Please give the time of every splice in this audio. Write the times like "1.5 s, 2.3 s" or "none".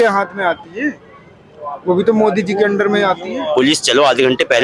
none